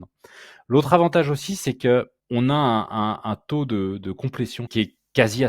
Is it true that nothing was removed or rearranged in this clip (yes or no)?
no